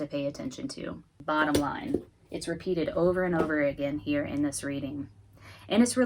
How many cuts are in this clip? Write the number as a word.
one